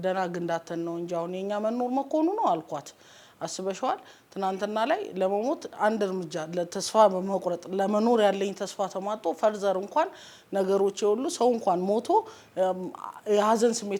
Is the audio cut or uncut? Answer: uncut